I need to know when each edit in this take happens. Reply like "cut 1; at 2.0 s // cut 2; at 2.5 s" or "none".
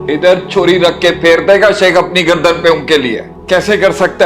cut 1; at 3.3 s